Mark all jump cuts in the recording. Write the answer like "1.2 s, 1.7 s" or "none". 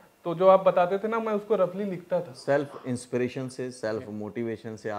2.4 s